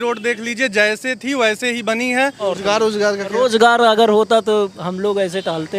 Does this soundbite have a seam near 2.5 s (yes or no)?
yes